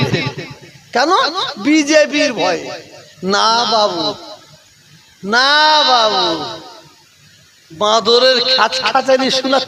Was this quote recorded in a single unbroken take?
yes; 0 cuts

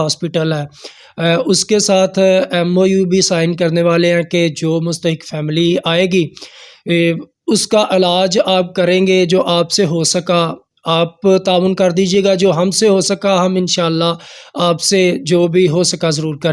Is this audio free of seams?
yes; 0 cuts

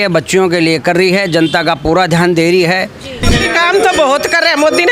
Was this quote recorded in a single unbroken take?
no; 1 cut; at 3.3 s

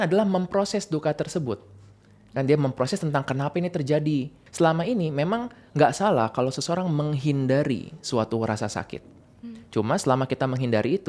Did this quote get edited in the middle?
yes; 1 cut; at 4.4 s

